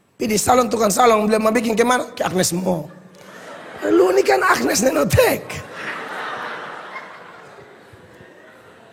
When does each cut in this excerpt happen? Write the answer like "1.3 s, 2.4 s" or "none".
none